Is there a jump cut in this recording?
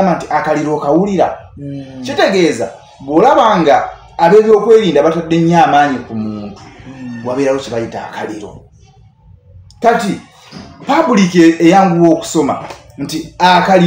no; 0 cuts

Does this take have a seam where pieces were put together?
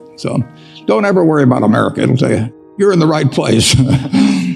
yes; 1 cut; at 2.7 s

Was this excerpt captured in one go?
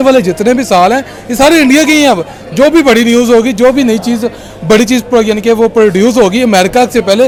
yes; 0 cuts

